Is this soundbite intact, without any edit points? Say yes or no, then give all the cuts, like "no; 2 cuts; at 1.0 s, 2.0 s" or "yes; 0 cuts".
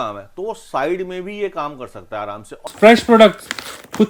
no; 1 cut; at 2.7 s